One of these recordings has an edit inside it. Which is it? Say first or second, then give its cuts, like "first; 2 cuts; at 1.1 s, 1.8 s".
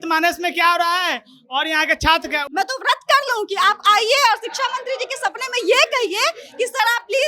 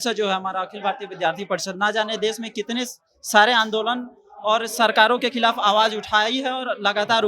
first; 1 cut; at 2.4 s